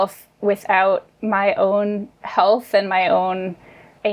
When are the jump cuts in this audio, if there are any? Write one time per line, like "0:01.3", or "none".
0:01.1